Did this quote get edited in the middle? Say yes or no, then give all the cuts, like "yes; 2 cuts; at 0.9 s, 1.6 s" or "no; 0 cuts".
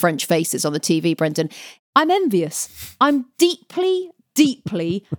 yes; 1 cut; at 1.7 s